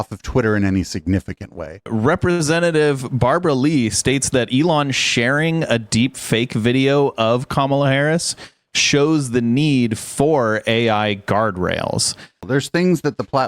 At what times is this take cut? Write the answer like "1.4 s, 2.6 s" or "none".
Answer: 1.9 s, 12.4 s